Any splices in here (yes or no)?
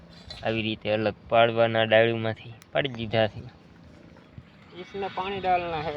yes